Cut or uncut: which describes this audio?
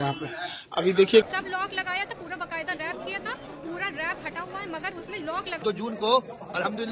cut